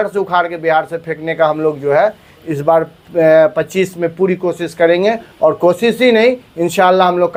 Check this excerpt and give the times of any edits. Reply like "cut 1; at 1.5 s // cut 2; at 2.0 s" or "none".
none